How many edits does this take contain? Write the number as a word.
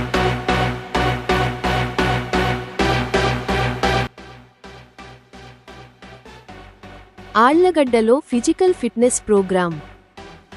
one